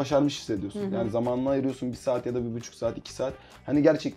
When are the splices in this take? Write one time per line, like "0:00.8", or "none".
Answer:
none